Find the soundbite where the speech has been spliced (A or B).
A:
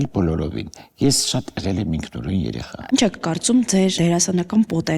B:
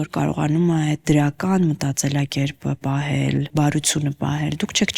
A